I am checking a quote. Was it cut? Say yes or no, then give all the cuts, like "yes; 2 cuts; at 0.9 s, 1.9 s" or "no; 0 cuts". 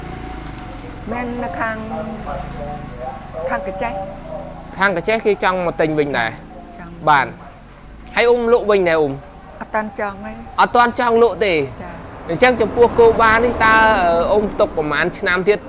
no; 0 cuts